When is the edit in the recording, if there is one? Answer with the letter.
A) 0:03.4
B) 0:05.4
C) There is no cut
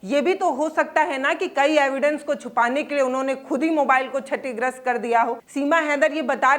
B